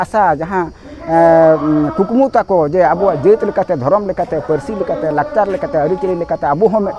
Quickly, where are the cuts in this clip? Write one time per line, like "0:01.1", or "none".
none